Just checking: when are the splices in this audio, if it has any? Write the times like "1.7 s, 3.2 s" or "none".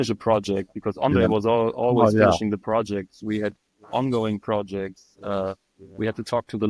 none